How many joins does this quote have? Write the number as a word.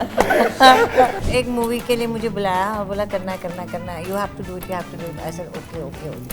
one